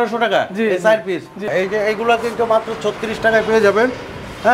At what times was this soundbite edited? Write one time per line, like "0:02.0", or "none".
0:01.5